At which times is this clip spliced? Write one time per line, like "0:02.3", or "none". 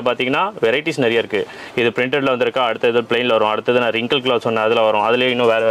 none